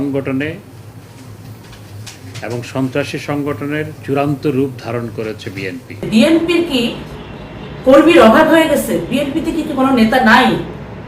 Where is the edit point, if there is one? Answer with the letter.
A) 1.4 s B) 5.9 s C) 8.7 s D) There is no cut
B